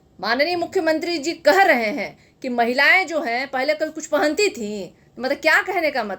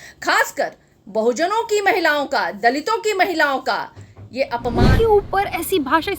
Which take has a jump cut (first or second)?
second